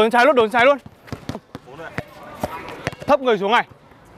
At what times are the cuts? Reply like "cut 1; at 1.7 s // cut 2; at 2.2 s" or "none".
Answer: cut 1; at 1.4 s